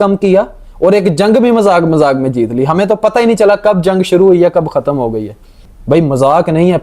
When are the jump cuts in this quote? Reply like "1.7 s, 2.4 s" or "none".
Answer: 5.7 s